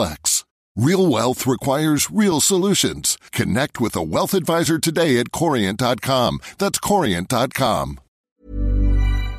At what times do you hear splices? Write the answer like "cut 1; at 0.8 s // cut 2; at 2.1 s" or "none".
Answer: cut 1; at 8.4 s